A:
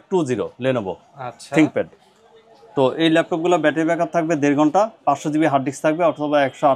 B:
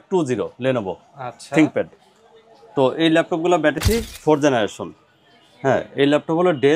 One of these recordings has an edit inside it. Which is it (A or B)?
B